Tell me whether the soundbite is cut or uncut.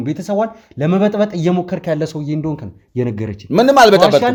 uncut